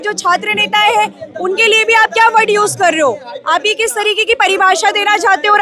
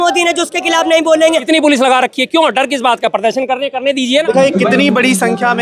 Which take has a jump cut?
second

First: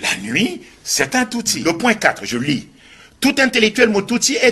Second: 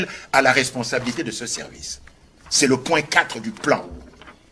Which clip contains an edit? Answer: first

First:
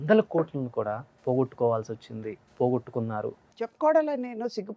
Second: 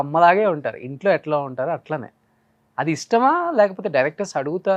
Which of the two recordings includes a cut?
first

